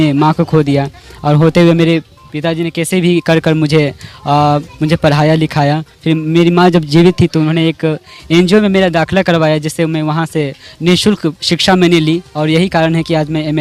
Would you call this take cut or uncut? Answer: uncut